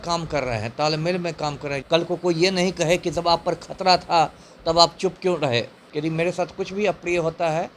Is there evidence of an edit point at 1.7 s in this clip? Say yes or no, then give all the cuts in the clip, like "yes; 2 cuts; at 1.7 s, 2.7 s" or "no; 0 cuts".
yes; 2 cuts; at 1.7 s, 5.8 s